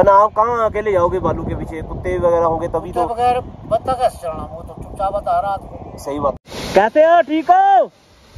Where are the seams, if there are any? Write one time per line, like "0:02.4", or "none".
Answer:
0:06.4